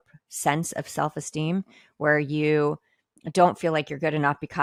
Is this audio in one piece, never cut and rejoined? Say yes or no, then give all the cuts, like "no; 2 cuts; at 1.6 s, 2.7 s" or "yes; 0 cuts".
yes; 0 cuts